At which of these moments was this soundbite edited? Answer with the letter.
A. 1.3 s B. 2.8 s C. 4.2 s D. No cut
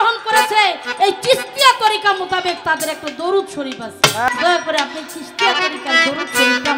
C